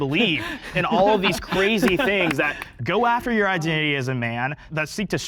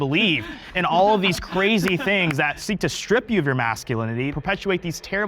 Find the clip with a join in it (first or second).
second